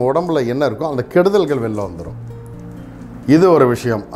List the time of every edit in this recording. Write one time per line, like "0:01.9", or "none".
none